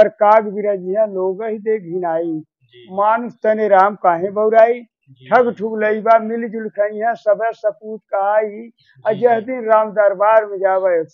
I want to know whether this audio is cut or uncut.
uncut